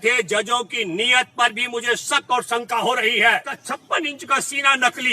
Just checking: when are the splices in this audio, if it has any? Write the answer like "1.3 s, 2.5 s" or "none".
3.6 s